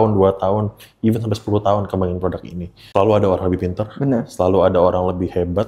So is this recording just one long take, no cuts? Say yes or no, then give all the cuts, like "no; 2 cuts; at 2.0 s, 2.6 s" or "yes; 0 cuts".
no; 1 cut; at 2.7 s